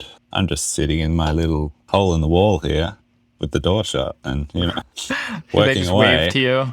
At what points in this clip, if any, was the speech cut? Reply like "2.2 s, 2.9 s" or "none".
none